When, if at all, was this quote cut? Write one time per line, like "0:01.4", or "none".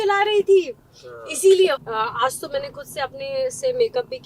0:01.8